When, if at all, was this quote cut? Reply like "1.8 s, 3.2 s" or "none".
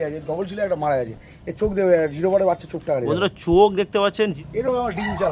4.3 s

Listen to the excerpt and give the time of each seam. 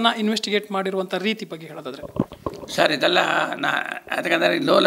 none

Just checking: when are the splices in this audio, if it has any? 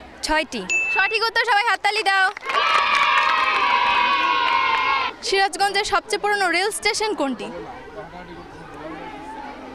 2.4 s, 3.9 s, 5.0 s

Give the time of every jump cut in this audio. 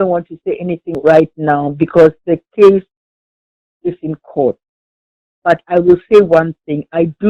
none

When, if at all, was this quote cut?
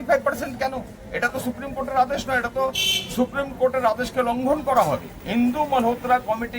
5.1 s

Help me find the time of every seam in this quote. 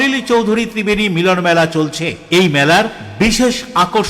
none

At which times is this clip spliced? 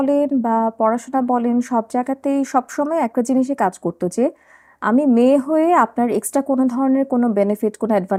none

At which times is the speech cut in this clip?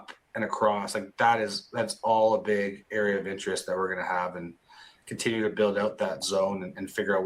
none

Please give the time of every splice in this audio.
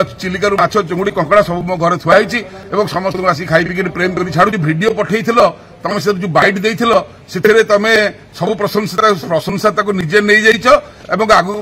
4.5 s

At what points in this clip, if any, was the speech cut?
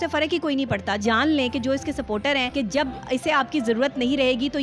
1.0 s, 2.5 s

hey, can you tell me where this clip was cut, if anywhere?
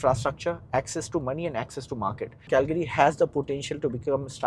2.5 s

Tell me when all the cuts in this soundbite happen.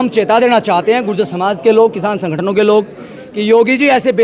none

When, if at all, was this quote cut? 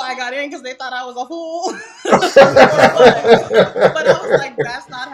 none

